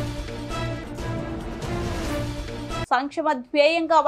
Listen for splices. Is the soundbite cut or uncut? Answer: cut